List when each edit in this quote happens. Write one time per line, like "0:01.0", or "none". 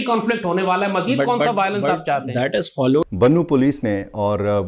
0:03.0

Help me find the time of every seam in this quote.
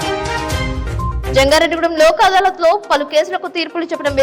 0:01.2

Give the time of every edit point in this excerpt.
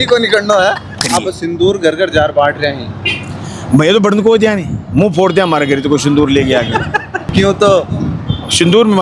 0:01.0
0:07.2

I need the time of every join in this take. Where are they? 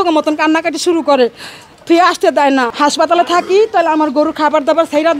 0:02.7

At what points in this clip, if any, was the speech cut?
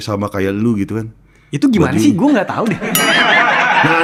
none

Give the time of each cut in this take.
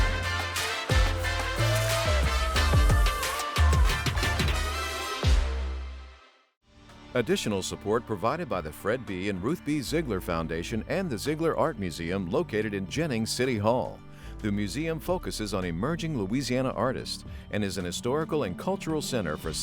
0:07.0

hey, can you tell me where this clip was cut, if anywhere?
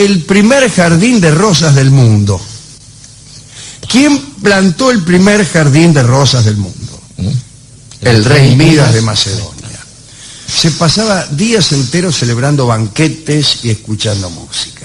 0:05.8

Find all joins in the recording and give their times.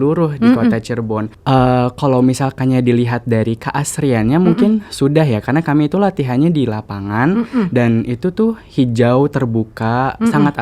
0:01.3

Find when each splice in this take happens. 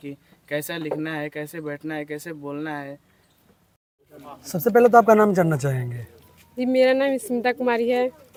none

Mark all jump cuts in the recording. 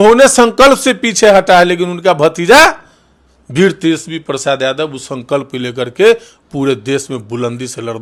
none

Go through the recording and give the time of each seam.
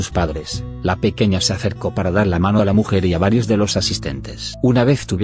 0:03.1

